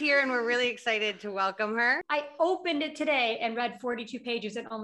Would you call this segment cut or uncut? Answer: cut